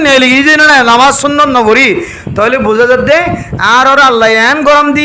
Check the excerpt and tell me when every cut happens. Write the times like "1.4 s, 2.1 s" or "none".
none